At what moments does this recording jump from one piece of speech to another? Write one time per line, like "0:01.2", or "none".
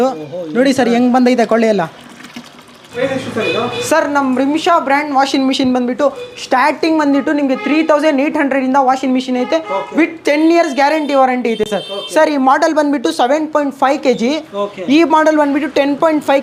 none